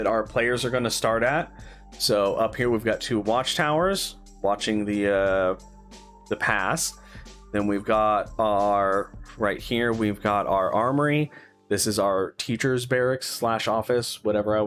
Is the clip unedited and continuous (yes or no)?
yes